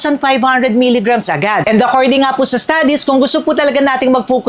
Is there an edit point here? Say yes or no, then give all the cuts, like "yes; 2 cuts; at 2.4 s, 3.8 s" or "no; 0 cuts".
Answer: no; 0 cuts